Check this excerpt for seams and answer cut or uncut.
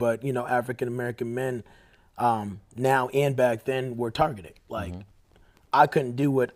uncut